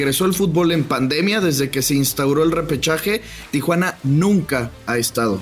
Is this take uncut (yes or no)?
no